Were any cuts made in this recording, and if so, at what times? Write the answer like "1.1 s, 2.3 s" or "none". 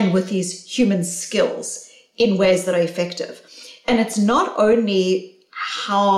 none